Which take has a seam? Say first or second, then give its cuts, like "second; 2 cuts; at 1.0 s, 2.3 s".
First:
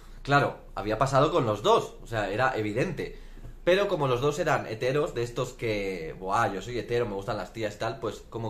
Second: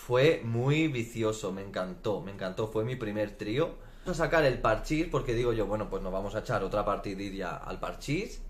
second; 1 cut; at 4.1 s